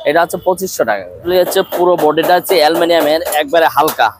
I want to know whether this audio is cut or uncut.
cut